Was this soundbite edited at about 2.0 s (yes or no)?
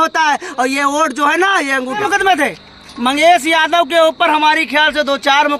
yes